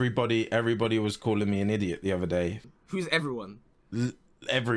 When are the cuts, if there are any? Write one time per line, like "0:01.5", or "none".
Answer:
0:02.6